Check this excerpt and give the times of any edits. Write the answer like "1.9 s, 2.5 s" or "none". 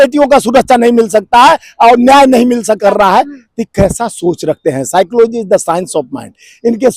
2.8 s